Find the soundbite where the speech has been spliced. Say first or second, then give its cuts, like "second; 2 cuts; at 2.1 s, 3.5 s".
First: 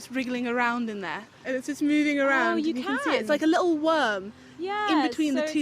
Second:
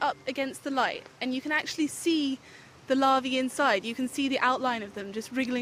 first; 1 cut; at 1.3 s